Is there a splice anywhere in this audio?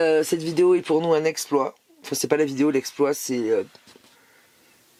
no; 0 cuts

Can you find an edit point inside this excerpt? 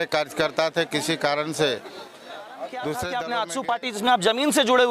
yes; 1 cut; at 2.8 s

